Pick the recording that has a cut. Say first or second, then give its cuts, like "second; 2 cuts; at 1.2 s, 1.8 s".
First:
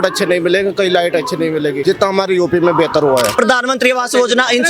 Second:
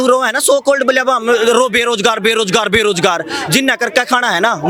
first; 2 cuts; at 1.8 s, 3.3 s